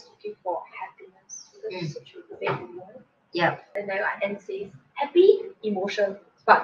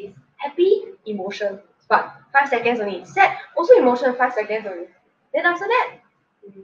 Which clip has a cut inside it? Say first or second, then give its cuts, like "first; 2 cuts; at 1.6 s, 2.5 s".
first; 1 cut; at 3.7 s